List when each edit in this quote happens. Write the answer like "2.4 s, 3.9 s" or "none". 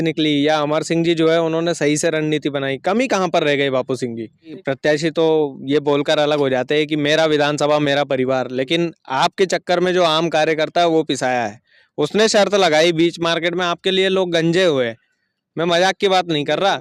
4.6 s